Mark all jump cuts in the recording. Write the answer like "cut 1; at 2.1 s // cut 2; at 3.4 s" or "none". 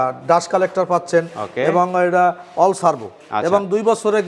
none